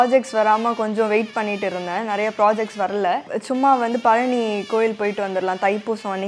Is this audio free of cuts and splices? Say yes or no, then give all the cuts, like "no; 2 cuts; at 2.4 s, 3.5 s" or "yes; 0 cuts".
no; 1 cut; at 3.3 s